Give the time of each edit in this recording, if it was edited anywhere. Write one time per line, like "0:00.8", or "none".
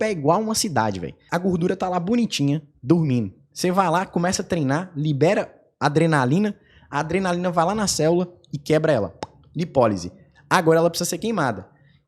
0:01.1